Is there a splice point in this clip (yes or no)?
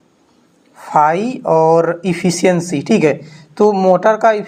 no